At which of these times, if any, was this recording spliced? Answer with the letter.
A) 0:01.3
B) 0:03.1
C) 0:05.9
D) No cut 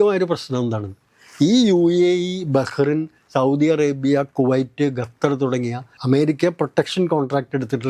C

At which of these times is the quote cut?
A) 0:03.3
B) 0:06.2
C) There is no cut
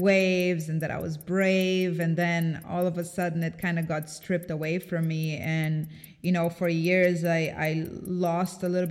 C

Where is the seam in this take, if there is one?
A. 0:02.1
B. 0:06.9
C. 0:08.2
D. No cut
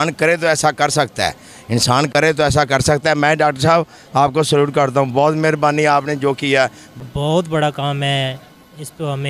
B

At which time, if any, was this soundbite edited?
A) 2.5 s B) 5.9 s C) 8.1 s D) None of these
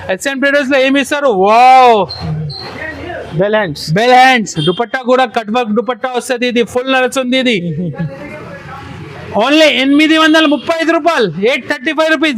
D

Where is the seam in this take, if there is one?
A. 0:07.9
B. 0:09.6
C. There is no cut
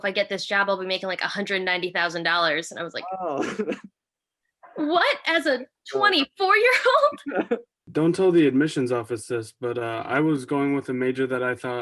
A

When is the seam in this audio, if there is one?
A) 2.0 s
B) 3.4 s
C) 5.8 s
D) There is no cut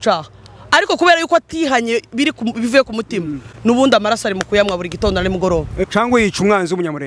C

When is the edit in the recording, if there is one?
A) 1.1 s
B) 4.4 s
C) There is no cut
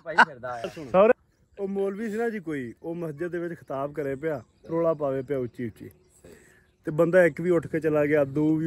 A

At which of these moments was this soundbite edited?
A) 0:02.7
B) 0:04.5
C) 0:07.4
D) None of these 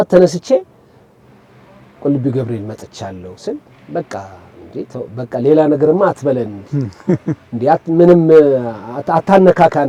D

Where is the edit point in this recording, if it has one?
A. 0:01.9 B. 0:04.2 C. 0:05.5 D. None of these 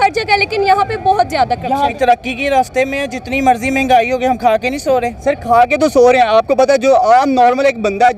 A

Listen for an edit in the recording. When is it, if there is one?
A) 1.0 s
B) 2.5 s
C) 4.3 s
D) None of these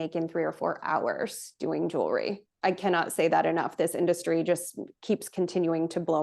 B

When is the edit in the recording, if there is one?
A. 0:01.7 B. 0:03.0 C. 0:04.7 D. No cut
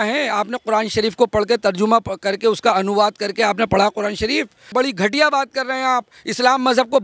C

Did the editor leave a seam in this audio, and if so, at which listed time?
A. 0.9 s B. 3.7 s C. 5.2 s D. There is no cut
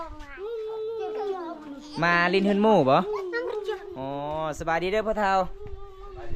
D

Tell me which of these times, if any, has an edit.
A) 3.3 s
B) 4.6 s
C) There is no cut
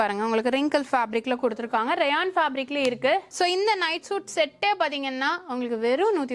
A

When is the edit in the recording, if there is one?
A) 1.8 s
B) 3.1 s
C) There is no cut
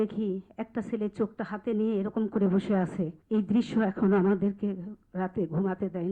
B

